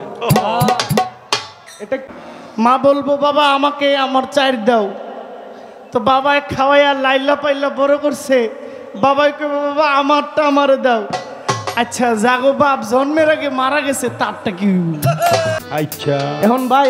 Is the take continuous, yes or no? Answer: no